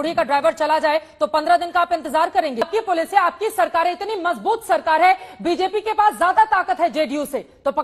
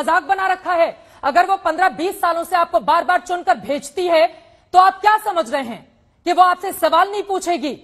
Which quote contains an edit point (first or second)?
first